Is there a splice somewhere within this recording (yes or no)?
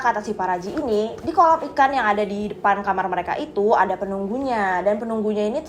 no